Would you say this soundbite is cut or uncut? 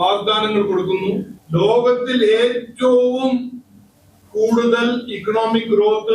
cut